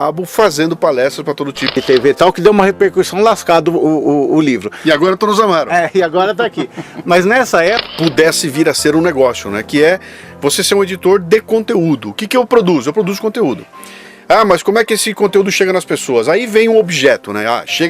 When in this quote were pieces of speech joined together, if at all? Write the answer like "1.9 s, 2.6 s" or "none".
1.7 s, 7.9 s

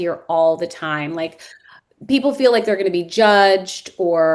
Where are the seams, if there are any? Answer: none

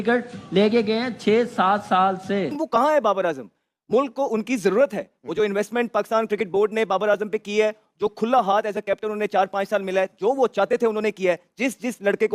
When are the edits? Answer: 2.6 s

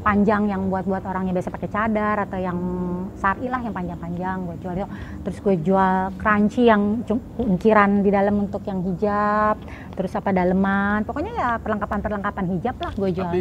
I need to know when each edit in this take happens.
none

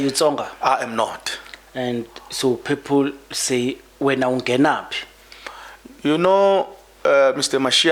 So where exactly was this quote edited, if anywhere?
none

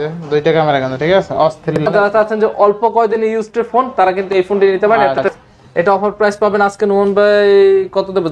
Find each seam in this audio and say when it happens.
1.8 s, 5.3 s

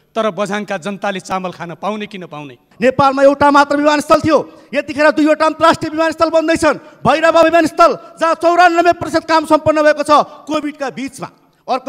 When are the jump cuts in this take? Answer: 2.6 s

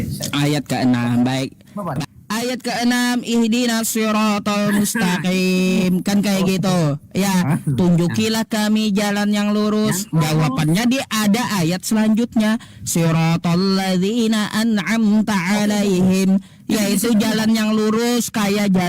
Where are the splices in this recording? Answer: 2.0 s

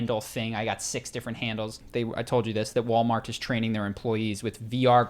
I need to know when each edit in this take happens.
1.8 s

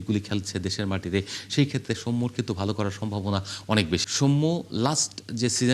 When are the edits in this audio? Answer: 4.0 s

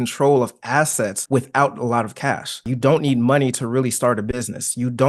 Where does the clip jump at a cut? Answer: 1.2 s, 2.7 s

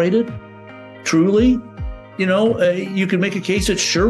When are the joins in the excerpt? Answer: none

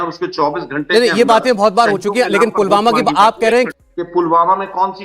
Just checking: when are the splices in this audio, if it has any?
3.7 s

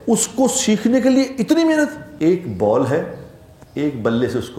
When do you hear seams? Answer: 2.0 s

